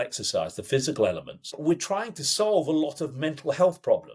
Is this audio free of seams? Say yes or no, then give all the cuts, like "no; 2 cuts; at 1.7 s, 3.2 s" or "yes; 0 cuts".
no; 1 cut; at 1.5 s